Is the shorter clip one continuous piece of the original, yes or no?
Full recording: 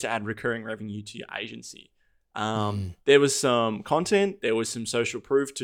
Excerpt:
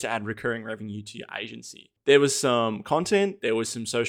no